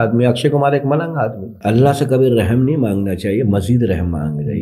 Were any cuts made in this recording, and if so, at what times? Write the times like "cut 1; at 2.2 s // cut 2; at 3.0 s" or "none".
cut 1; at 1.5 s

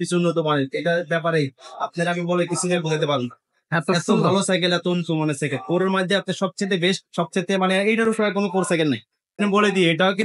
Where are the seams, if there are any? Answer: cut 1; at 9.3 s

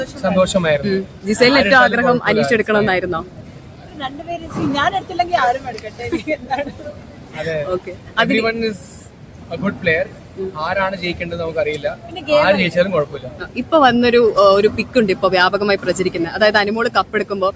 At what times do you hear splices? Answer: none

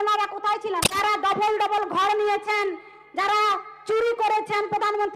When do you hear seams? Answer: cut 1; at 0.9 s

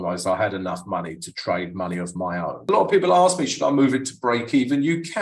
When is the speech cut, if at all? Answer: cut 1; at 2.7 s

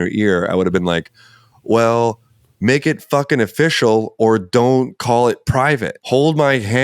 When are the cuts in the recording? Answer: cut 1; at 5.9 s

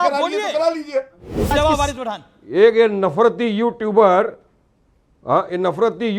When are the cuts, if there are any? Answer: cut 1; at 1.5 s

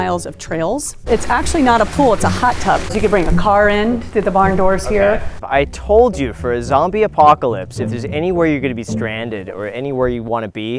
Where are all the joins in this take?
cut 1; at 1.1 s // cut 2; at 2.9 s // cut 3; at 5.3 s

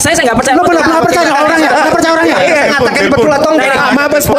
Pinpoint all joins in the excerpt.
none

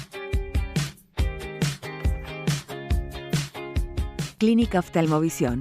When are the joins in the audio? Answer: cut 1; at 4.3 s

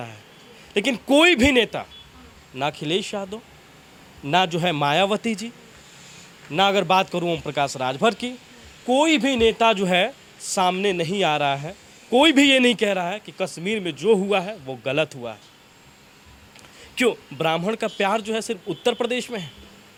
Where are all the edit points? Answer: none

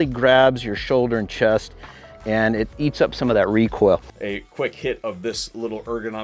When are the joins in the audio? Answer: none

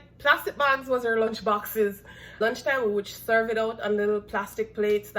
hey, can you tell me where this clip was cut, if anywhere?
cut 1; at 2.4 s

